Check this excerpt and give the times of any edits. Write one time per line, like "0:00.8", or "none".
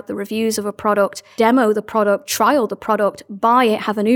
0:01.2